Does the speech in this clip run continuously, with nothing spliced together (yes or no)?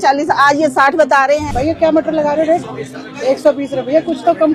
no